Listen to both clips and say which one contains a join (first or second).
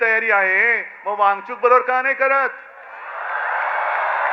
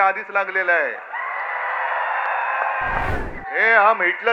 second